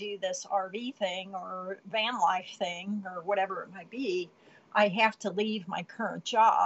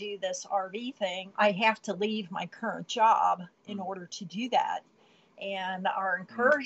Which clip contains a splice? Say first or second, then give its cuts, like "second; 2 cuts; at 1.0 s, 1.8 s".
second; 1 cut; at 1.2 s